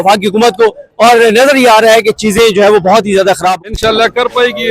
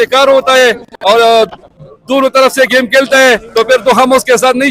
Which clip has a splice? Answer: first; 1 cut; at 3.6 s

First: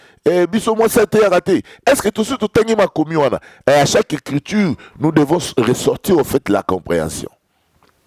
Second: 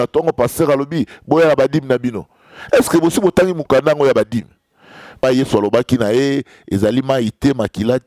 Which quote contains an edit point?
second; 1 cut; at 5.2 s

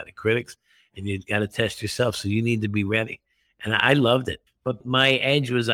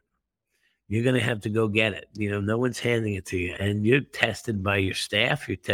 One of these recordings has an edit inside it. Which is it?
second; 1 cut; at 3.5 s

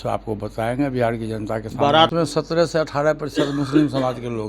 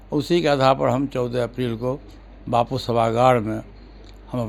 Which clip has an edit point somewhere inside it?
first; 1 cut; at 2.1 s

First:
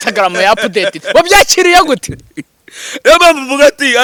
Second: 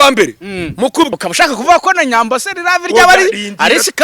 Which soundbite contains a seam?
second; 1 cut; at 1.1 s

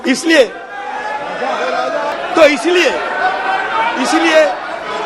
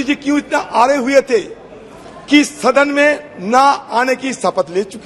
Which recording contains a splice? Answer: first; 1 cut; at 2.1 s

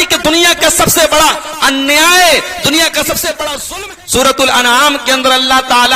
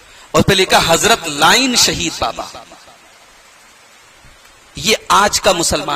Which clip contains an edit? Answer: first; 1 cut; at 3.6 s

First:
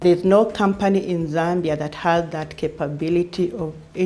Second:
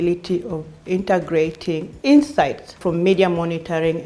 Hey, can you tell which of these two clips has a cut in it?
second; 2 cuts; at 1.9 s, 2.8 s

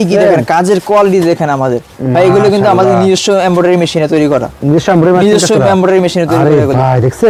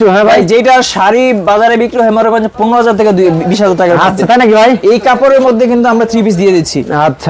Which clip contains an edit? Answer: second; 1 cut; at 2.5 s

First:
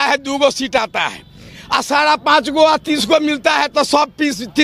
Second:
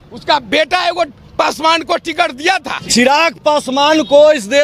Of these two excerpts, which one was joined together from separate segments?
second; 1 cut; at 2.7 s

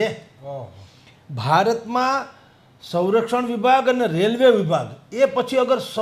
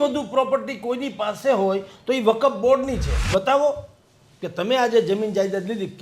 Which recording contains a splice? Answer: second; 1 cut; at 3.3 s

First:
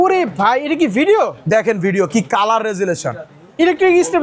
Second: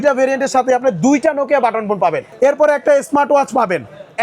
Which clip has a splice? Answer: second; 1 cut; at 2.3 s

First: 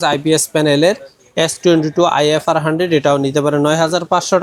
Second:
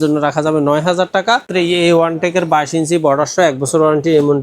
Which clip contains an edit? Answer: second; 1 cut; at 1.5 s

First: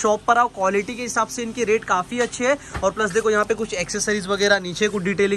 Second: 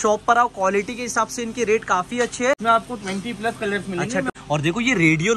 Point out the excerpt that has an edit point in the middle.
second; 2 cuts; at 2.6 s, 4.3 s

